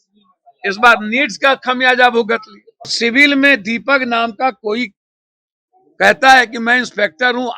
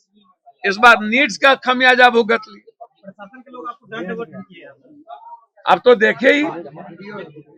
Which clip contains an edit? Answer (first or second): first